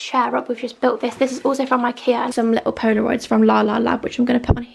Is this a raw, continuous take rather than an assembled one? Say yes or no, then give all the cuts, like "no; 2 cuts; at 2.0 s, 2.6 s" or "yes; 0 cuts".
no; 1 cut; at 2.3 s